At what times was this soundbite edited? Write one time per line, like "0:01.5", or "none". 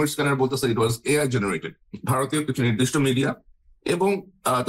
none